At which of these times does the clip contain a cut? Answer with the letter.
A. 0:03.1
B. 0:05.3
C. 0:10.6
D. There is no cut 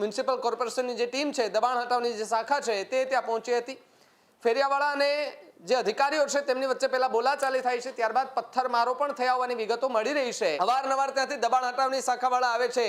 C